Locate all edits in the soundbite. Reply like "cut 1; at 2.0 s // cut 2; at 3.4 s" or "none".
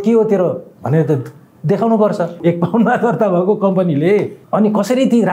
cut 1; at 2.4 s // cut 2; at 4.4 s